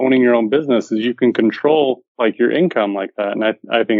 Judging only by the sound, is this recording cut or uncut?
cut